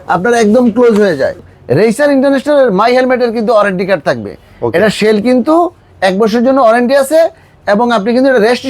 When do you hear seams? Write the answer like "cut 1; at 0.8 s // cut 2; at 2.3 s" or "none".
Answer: cut 1; at 1.4 s